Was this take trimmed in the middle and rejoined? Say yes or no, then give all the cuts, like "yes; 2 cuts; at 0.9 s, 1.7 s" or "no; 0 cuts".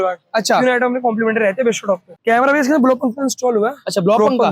yes; 1 cut; at 2.2 s